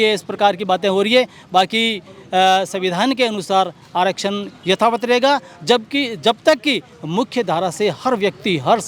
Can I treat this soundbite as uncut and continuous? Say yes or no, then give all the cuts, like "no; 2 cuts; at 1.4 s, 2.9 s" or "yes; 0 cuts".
yes; 0 cuts